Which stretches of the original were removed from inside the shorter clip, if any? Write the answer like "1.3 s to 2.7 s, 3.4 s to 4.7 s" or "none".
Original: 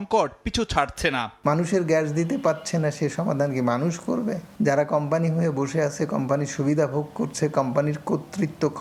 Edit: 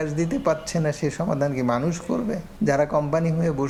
none